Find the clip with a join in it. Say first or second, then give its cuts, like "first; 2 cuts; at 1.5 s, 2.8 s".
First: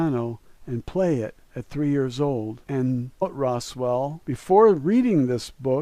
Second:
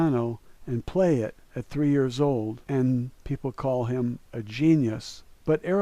second; 1 cut; at 3.1 s